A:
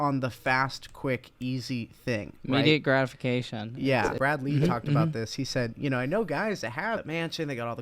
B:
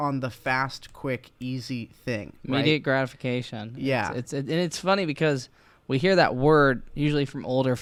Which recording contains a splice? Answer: A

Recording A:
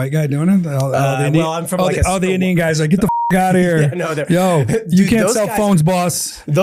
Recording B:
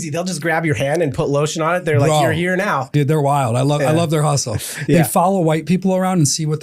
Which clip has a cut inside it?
B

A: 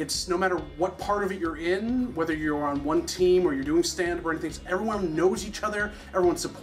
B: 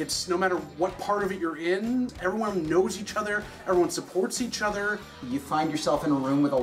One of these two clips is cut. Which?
B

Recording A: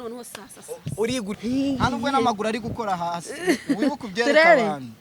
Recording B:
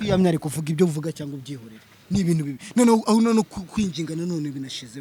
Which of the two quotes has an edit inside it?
A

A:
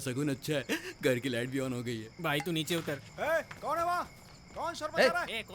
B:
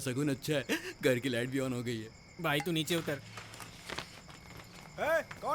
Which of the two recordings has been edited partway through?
A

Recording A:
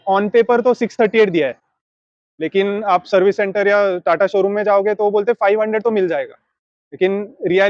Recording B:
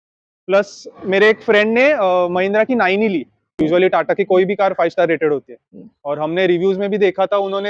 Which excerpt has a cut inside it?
B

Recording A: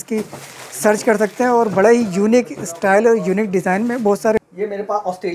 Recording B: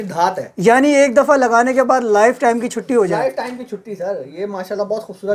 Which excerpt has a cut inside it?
A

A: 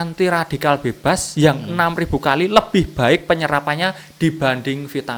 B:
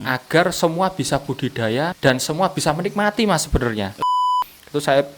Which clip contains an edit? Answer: B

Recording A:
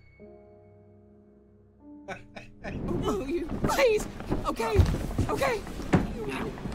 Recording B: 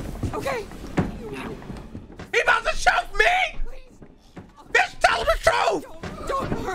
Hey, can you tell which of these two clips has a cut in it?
A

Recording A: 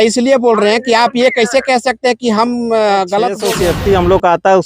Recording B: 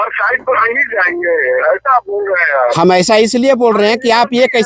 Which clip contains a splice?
A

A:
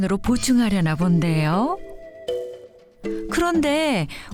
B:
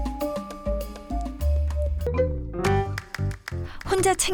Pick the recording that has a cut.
B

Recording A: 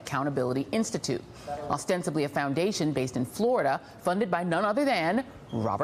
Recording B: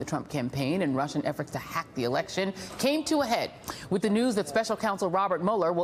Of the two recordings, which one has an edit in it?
B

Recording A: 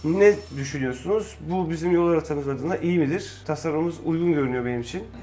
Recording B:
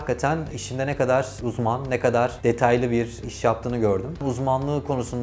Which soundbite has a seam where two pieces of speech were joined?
B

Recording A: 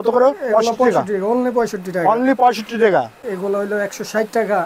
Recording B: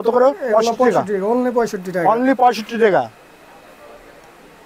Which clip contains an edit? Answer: A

